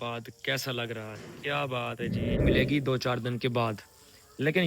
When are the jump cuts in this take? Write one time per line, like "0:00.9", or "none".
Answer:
0:02.4

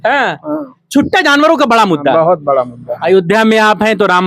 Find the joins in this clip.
0:03.0

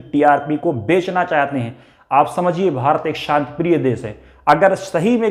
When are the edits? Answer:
none

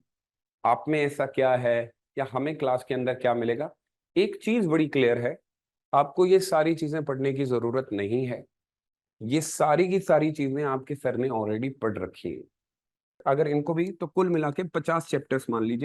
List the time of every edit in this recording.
none

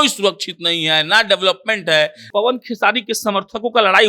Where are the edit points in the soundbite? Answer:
0:02.3

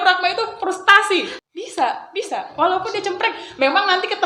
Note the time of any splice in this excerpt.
0:01.4

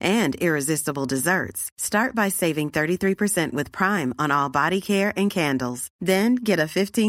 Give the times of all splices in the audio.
none

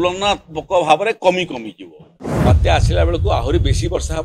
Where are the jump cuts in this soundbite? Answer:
0:02.2

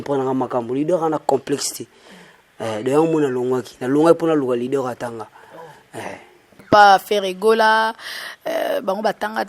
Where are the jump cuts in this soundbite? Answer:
0:06.5

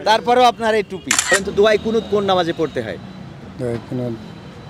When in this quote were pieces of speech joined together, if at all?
0:01.3

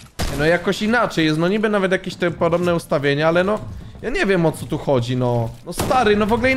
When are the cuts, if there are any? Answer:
none

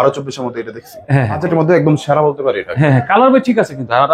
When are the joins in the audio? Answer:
0:01.4

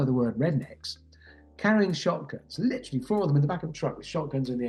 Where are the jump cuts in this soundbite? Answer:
none

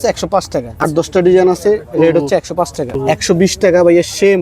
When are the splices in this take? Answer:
0:01.1
0:03.0

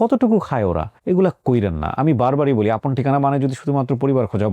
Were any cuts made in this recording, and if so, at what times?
0:00.9

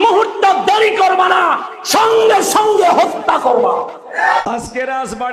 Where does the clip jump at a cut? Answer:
0:04.4

